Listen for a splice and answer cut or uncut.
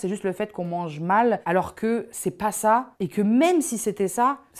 cut